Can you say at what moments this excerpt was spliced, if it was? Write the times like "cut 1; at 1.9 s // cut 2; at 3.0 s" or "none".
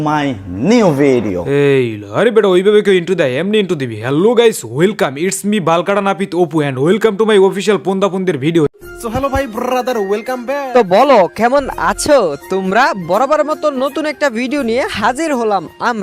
cut 1; at 8.7 s